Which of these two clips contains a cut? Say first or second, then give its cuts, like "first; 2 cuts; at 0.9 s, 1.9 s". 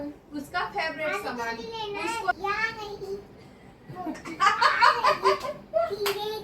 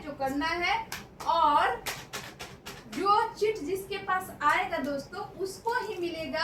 first; 1 cut; at 2.3 s